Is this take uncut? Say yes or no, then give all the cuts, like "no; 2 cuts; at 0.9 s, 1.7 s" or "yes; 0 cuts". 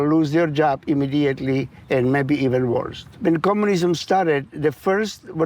no; 2 cuts; at 1.7 s, 3.0 s